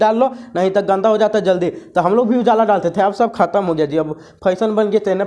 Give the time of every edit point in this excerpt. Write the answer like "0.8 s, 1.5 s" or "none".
1.0 s